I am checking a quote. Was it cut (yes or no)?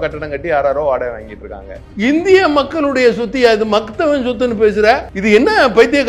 yes